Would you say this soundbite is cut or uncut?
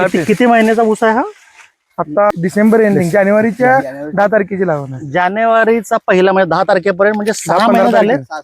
cut